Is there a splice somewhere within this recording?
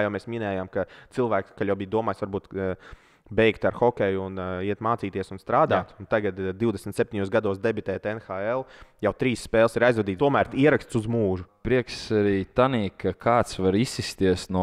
yes; 3 cuts; at 1.5 s, 10.2 s, 11.5 s

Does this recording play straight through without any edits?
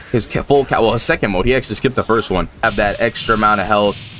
no; 1 cut; at 2.7 s

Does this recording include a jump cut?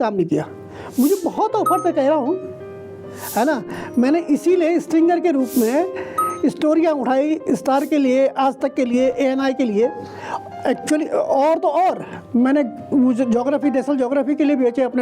no; 0 cuts

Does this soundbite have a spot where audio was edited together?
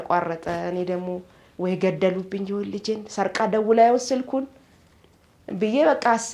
no; 0 cuts

